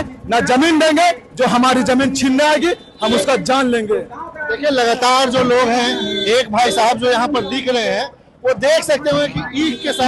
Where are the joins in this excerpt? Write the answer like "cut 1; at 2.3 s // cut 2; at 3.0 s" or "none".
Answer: none